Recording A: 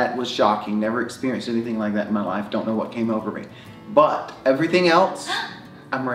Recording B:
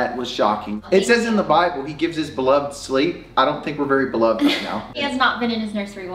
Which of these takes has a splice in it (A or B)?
B